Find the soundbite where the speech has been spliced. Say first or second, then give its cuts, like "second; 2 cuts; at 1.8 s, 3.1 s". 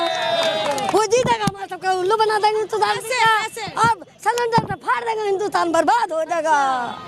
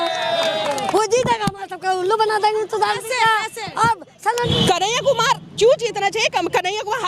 second; 1 cut; at 4.5 s